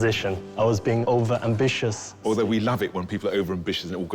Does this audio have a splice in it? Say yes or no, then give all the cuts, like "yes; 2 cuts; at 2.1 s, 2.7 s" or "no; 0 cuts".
yes; 2 cuts; at 0.7 s, 2.2 s